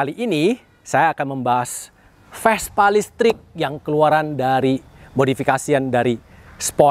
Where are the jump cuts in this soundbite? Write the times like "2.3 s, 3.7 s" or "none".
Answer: none